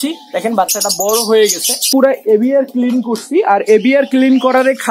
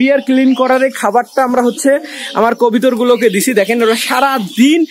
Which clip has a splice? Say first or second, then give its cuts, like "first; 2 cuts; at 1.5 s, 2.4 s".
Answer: first; 1 cut; at 1.9 s